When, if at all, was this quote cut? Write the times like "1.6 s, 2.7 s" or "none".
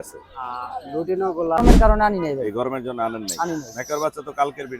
1.6 s